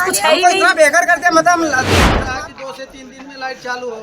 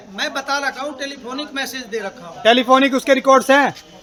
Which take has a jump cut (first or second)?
first